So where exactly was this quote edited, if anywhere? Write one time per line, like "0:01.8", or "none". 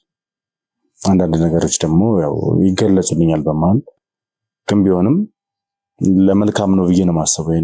none

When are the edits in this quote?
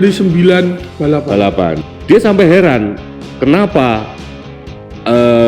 0:01.8

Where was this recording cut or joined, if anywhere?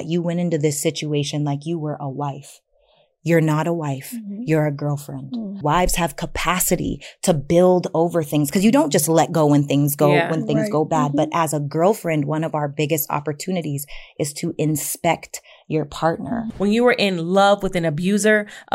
0:05.6
0:16.5

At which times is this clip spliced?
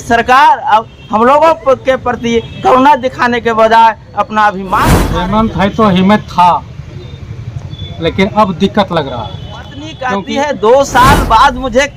0:04.9
0:10.1

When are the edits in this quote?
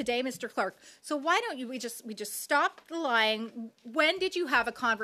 none

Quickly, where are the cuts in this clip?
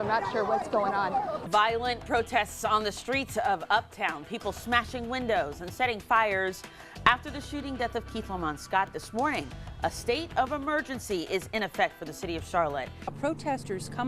0:01.4
0:13.2

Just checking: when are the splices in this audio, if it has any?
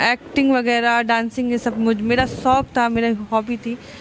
none

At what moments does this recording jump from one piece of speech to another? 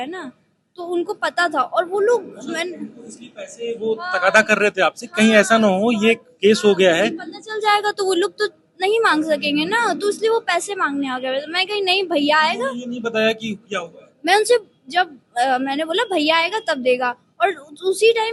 none

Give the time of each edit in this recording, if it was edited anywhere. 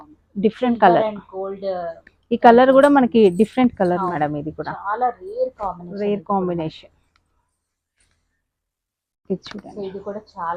none

